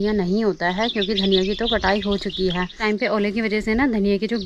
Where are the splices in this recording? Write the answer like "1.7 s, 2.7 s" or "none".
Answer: 2.8 s